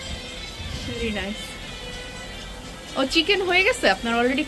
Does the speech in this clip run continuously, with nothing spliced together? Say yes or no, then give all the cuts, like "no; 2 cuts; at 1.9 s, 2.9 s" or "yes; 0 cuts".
yes; 0 cuts